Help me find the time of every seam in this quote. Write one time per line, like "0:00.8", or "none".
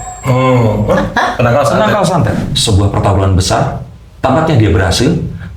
0:02.5